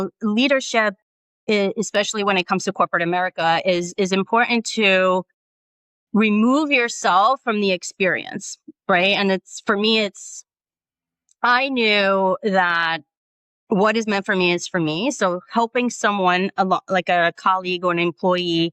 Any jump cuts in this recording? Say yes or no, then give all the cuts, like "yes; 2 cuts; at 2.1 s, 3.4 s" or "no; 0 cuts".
no; 0 cuts